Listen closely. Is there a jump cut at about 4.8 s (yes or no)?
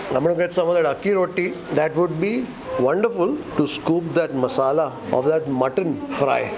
no